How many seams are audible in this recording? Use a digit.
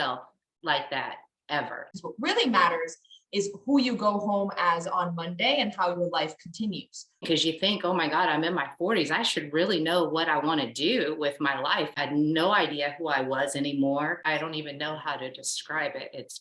4